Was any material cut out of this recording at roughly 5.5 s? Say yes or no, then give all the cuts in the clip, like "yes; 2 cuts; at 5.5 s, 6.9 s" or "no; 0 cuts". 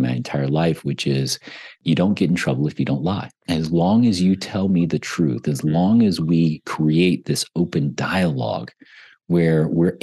no; 2 cuts; at 1.8 s, 3.3 s